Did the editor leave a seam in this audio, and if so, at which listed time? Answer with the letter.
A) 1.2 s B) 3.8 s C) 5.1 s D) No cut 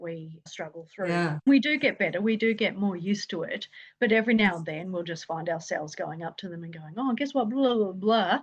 A